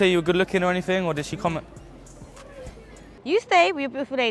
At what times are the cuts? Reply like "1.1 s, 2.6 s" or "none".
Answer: 3.1 s